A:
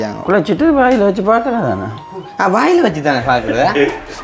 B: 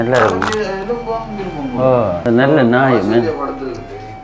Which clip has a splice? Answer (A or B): B